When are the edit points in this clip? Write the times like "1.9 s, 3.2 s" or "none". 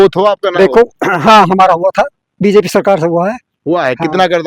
none